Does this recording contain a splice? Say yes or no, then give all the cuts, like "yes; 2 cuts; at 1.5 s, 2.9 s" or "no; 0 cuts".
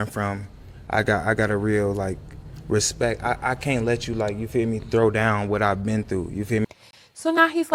no; 0 cuts